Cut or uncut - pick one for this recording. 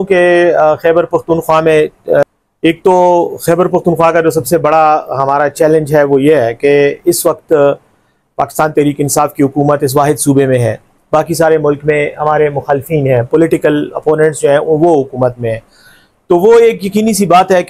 uncut